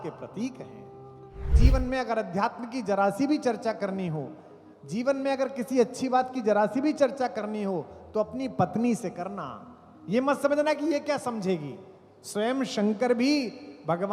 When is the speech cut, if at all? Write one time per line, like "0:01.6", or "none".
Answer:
0:01.5